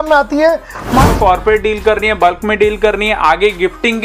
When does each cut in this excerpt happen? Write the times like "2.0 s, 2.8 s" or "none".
1.1 s